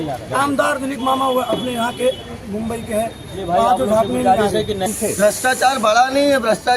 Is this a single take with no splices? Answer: no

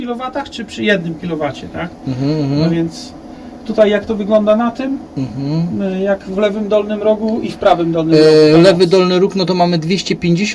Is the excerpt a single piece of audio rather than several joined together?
yes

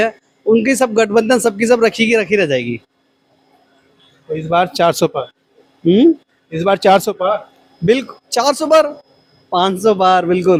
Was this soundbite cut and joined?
no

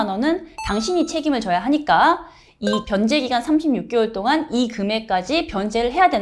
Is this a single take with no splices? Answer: yes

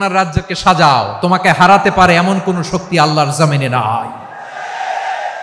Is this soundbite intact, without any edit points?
yes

